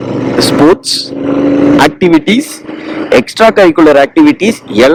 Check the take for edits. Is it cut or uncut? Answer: uncut